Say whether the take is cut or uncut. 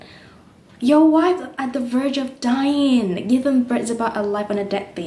uncut